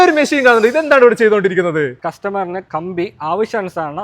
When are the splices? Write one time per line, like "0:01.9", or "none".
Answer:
0:02.0